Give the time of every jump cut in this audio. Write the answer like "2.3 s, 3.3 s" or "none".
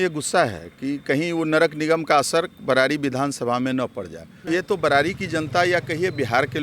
4.4 s